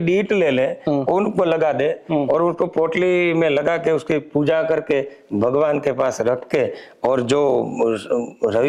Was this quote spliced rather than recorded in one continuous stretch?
no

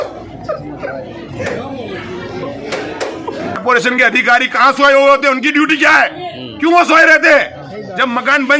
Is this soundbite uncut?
no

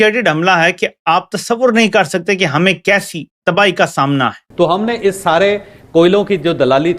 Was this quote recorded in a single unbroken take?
no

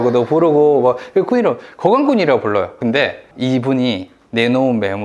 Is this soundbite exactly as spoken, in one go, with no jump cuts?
no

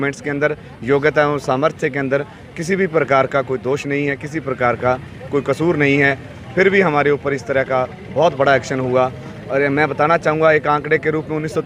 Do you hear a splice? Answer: no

